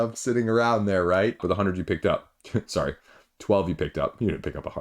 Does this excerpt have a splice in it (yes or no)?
yes